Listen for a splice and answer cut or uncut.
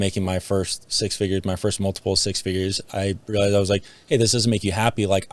uncut